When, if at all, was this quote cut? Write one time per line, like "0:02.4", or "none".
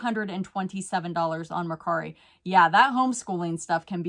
none